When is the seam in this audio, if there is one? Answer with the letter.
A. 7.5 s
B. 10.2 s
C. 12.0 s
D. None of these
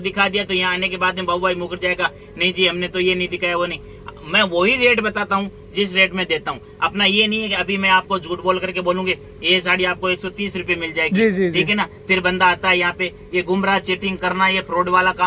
D